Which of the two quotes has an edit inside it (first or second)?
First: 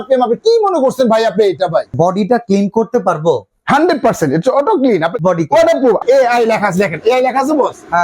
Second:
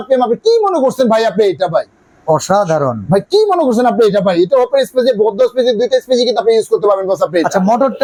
first